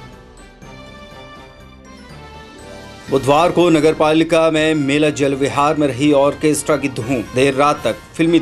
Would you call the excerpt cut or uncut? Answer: cut